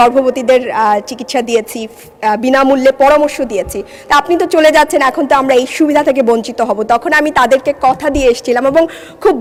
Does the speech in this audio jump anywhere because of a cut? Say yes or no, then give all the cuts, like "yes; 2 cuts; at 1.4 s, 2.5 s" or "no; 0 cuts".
no; 0 cuts